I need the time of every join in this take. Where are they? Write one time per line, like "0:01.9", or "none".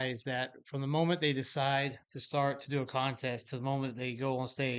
none